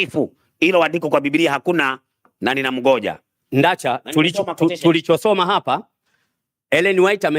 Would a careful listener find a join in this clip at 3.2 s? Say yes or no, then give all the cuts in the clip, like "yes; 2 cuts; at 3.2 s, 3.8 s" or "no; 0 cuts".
yes; 1 cut; at 3.2 s